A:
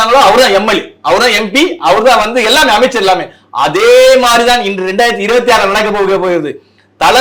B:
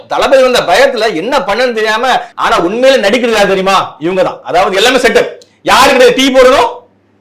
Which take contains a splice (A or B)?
B